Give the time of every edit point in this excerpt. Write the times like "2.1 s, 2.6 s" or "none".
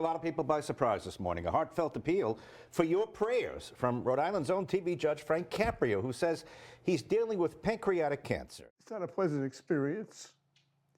8.5 s